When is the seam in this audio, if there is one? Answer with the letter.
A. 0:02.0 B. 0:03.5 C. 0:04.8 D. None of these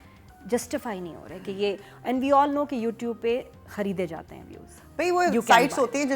D